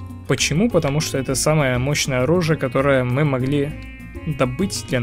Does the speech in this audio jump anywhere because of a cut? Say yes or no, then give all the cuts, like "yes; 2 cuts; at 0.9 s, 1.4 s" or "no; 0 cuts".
no; 0 cuts